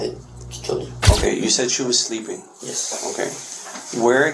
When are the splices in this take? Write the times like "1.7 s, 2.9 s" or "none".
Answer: none